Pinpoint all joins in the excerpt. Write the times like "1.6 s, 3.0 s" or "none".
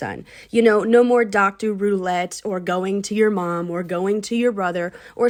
none